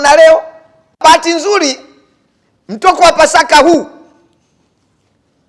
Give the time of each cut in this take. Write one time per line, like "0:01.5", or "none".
0:01.0